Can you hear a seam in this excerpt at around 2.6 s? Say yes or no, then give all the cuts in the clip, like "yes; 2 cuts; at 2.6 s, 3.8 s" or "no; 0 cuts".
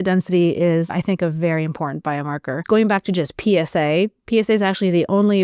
yes; 2 cuts; at 0.9 s, 2.6 s